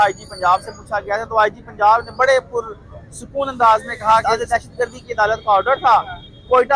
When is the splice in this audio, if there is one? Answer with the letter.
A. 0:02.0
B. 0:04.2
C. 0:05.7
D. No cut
B